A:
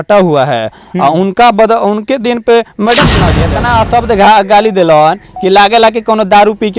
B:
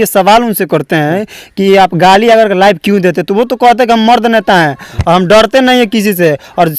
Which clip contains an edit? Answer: A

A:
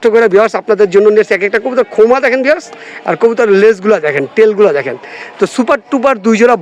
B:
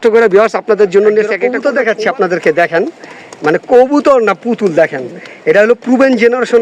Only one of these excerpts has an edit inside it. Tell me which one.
B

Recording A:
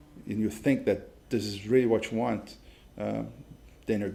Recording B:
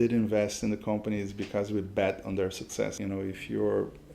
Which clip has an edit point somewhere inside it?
B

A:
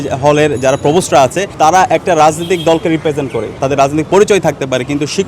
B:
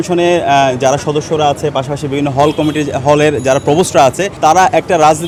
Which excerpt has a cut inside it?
A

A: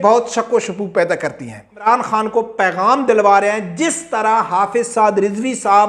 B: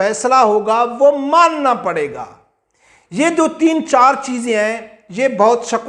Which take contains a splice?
A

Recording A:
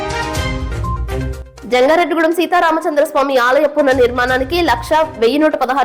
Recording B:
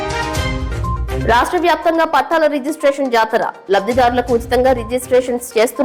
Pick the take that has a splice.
A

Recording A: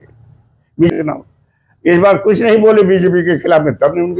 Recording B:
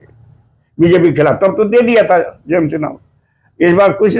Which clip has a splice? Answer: A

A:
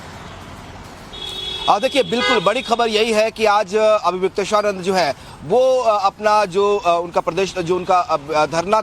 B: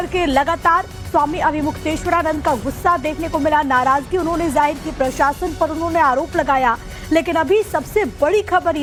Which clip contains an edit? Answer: A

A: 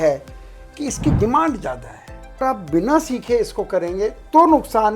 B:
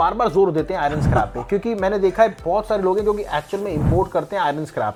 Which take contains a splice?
A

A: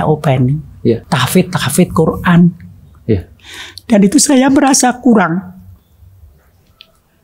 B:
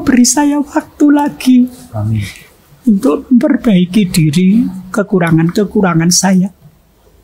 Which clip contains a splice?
A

